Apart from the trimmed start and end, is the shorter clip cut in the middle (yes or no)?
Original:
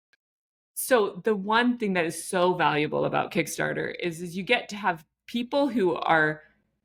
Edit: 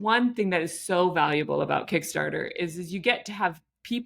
no